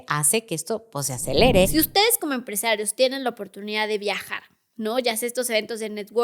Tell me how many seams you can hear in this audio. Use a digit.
1